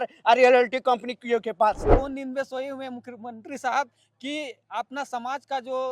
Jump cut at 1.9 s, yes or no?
yes